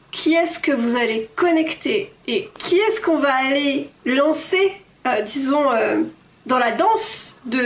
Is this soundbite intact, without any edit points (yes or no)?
no